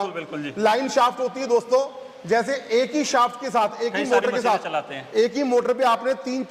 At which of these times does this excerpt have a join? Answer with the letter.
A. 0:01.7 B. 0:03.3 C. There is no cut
C